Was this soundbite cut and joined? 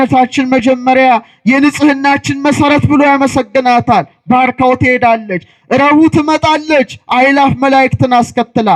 no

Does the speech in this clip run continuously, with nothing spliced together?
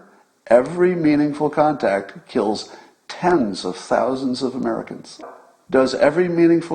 no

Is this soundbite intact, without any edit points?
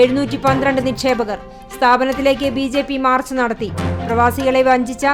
yes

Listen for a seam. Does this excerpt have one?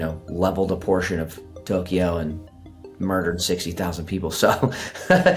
no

